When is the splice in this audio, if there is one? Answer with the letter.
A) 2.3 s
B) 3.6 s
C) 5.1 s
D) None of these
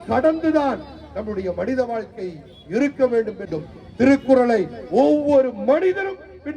B